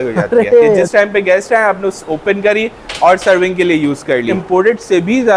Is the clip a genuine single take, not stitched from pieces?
no; 2 cuts; at 0.9 s, 4.4 s

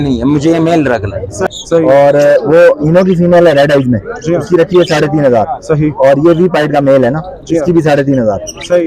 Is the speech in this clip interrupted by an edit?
yes; 1 cut; at 1.5 s

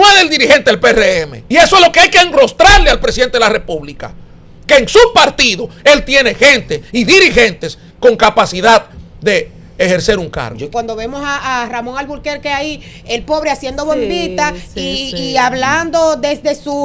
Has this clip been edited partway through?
yes; 2 cuts; at 1.3 s, 10.7 s

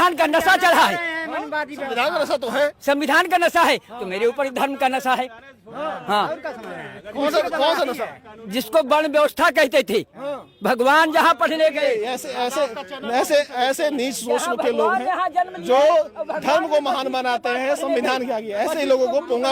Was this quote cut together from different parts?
no; 0 cuts

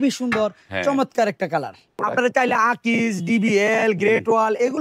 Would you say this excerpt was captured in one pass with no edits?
no; 1 cut; at 1.9 s

